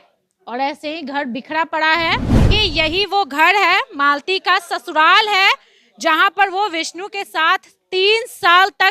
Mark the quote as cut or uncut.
cut